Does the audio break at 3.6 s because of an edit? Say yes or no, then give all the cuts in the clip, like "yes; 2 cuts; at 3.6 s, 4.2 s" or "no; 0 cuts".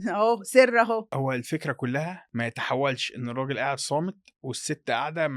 no; 2 cuts; at 1.1 s, 2.2 s